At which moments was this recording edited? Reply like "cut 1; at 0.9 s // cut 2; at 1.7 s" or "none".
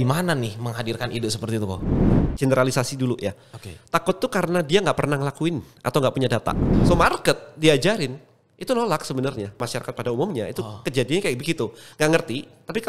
cut 1; at 1.9 s // cut 2; at 6.7 s // cut 3; at 9.6 s

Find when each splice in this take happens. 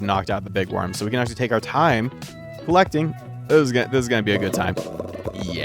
none

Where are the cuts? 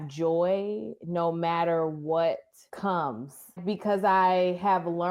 cut 1; at 2.6 s // cut 2; at 3.6 s

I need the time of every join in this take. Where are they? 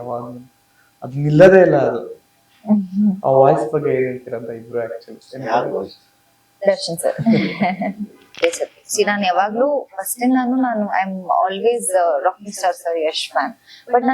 cut 1; at 8.3 s

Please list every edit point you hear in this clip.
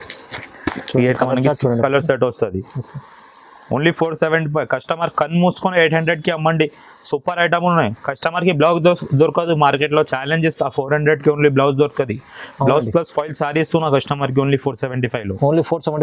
none

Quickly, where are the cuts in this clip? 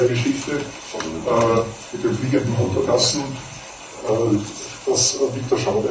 none

